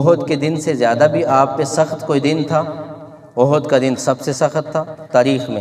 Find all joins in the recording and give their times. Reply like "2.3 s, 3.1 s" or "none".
none